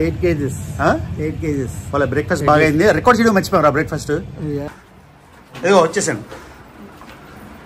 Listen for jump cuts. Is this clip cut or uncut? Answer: cut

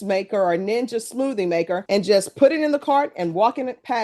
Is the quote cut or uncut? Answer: uncut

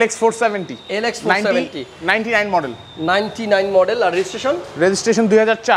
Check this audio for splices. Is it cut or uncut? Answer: uncut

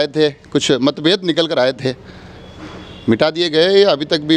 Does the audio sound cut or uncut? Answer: uncut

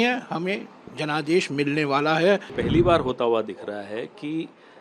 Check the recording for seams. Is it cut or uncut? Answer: cut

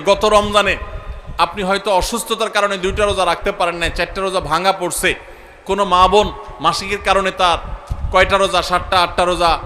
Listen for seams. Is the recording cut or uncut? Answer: uncut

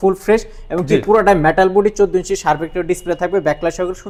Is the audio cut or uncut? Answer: uncut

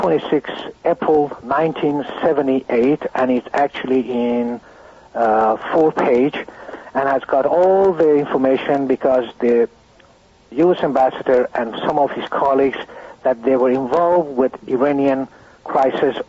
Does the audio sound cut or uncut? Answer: cut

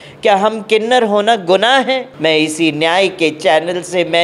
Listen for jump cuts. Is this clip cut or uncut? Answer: cut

